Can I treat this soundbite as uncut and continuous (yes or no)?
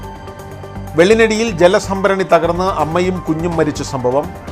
no